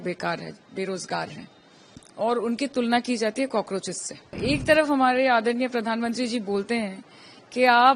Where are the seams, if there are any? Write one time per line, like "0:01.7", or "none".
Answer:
0:04.3